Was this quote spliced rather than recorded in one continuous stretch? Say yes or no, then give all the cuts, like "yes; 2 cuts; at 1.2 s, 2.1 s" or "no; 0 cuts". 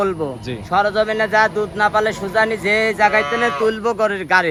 no; 0 cuts